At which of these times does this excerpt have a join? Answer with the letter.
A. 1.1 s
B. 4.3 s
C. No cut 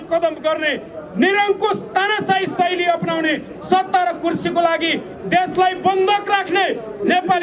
C